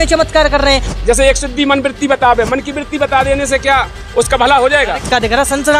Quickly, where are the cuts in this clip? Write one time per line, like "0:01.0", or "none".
0:00.9
0:05.1